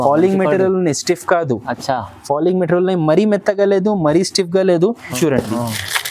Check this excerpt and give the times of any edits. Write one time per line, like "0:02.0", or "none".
0:05.1